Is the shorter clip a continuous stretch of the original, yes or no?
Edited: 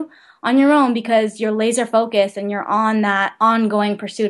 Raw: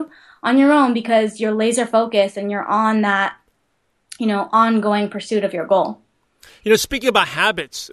no